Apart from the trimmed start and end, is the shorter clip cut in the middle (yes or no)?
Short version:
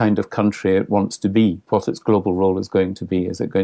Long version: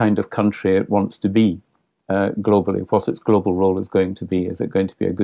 yes